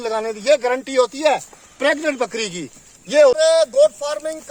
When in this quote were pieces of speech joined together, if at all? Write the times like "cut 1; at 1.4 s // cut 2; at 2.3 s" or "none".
cut 1; at 3.4 s